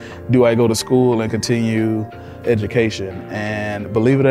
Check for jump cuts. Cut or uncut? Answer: cut